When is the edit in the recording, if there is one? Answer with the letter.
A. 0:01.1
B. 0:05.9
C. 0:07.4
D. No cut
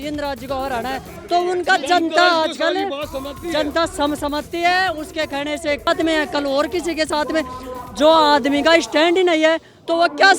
B